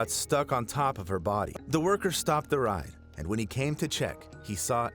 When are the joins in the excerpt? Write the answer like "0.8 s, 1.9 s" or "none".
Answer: 1.5 s